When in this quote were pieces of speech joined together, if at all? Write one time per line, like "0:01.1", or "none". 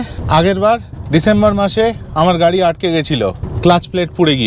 0:03.4